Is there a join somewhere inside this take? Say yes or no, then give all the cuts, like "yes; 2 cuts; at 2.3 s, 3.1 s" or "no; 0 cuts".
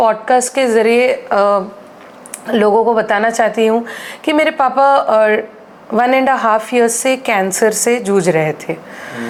no; 0 cuts